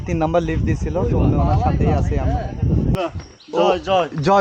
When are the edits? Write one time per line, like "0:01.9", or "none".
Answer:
0:03.0